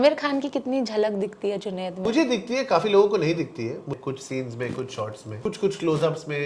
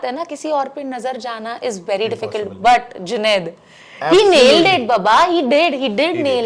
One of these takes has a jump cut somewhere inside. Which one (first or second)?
first